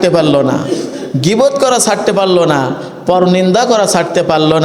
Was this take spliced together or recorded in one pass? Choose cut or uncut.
uncut